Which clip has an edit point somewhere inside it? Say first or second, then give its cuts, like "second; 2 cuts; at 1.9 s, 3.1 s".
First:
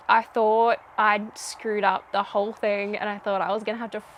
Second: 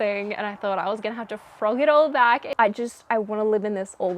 second; 1 cut; at 2.5 s